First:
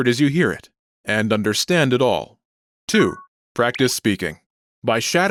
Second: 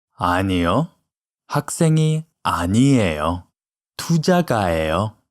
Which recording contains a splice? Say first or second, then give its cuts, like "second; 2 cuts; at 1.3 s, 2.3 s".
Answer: second; 1 cut; at 2.3 s